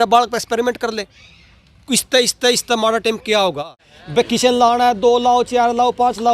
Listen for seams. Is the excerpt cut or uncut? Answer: cut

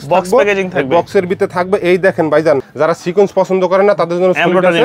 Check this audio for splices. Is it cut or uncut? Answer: cut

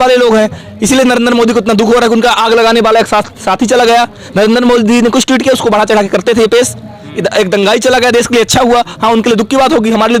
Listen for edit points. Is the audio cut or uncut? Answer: uncut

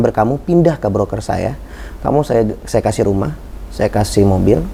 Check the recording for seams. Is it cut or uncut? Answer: uncut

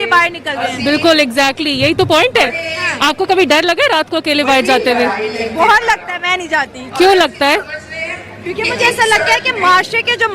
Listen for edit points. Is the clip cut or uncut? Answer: uncut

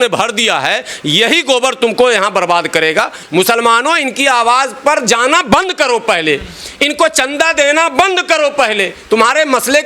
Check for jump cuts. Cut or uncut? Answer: cut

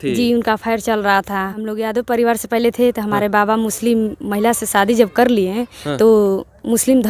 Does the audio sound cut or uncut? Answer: cut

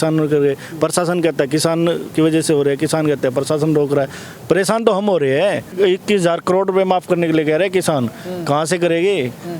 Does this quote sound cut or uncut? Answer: cut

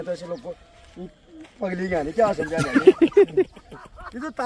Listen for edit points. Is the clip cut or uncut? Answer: uncut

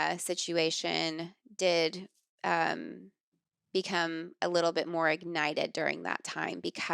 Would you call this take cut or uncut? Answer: uncut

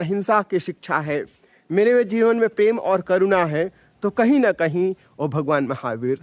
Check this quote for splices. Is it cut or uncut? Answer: uncut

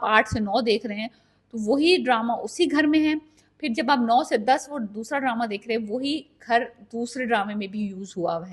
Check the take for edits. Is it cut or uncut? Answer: uncut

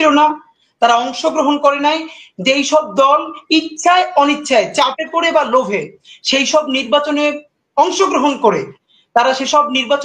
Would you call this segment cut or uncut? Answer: uncut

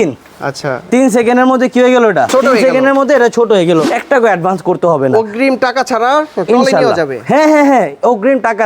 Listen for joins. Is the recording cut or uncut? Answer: cut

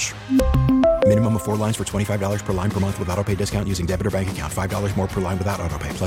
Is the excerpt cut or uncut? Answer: uncut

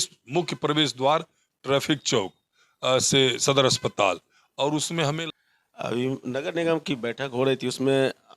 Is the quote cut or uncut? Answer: cut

